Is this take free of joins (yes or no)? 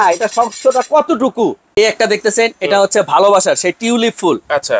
no